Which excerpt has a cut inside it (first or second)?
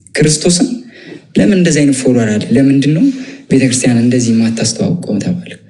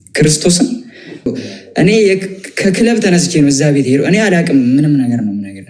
second